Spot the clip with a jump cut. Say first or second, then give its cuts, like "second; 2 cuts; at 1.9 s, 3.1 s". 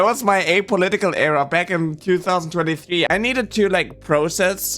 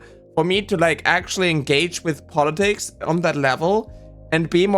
first; 1 cut; at 3.1 s